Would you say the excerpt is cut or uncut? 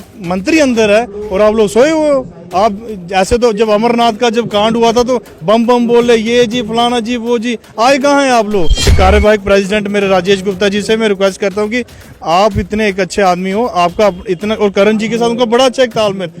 cut